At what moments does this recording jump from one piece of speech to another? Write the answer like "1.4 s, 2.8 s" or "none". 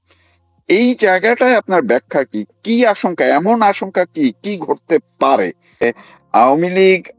5.8 s